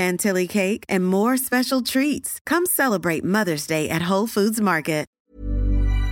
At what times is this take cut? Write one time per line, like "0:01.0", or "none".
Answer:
0:05.1